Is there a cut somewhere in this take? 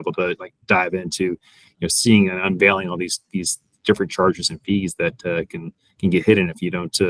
no; 0 cuts

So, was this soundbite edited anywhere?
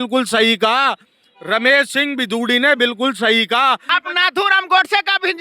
yes; 1 cut; at 3.9 s

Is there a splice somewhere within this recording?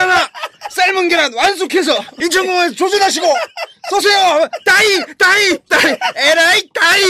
yes; 1 cut; at 2.1 s

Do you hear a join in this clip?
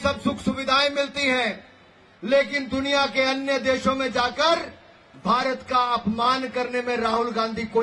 no; 0 cuts

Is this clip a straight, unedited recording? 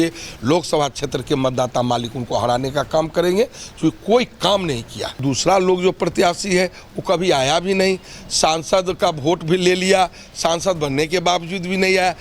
no; 1 cut; at 5.0 s

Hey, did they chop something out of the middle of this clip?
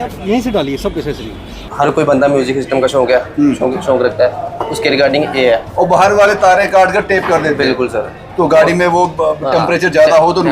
yes; 1 cut; at 1.7 s

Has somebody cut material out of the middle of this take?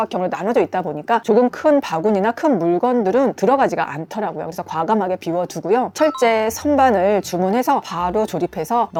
no; 0 cuts

